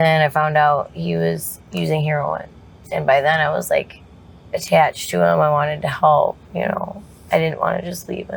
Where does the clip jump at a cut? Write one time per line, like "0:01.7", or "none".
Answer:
none